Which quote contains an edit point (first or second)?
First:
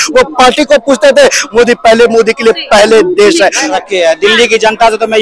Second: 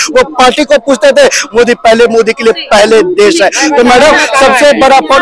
first